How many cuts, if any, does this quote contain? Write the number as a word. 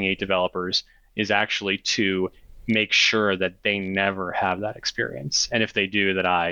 zero